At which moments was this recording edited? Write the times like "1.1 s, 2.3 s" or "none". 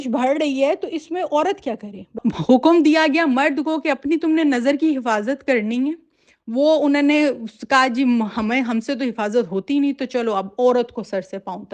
2.2 s